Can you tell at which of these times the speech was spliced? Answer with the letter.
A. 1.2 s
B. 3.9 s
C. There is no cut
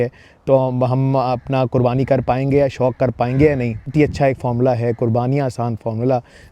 B